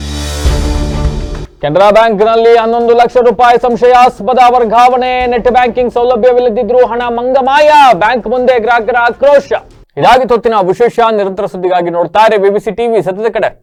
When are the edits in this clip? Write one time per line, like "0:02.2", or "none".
none